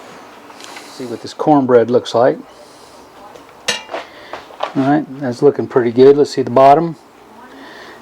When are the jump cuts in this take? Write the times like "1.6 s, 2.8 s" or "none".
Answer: 1.2 s